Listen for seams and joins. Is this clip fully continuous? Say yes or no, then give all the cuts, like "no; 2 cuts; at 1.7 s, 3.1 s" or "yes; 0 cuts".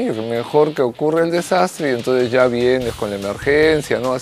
yes; 0 cuts